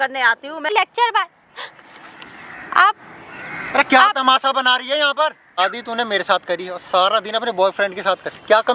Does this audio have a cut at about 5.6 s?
yes; 2 cuts; at 0.7 s, 5.6 s

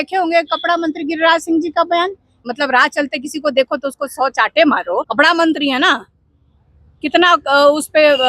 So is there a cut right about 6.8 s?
no; 2 cuts; at 2.4 s, 5.1 s

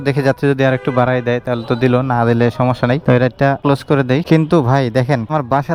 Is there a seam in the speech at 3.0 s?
no; 0 cuts

